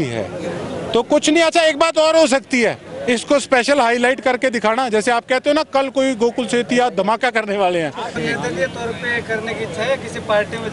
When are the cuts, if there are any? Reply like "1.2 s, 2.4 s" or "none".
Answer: 8.1 s